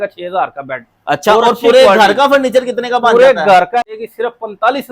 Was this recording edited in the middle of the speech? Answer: yes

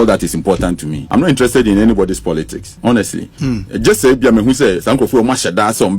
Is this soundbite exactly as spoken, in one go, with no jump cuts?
no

